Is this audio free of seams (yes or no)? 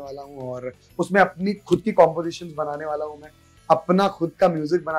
yes